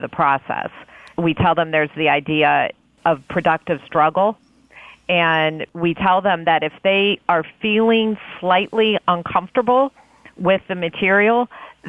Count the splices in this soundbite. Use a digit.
2